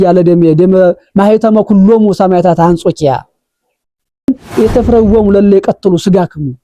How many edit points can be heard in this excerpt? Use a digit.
1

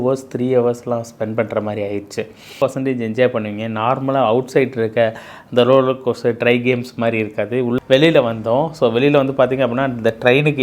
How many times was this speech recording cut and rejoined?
2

